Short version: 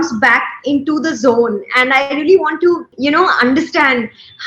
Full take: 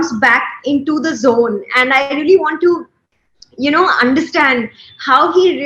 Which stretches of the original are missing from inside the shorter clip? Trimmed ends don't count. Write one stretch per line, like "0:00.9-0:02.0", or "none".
0:02.9-0:03.5